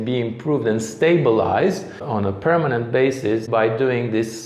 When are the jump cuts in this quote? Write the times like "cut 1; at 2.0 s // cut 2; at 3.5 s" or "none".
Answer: cut 1; at 2.0 s // cut 2; at 3.5 s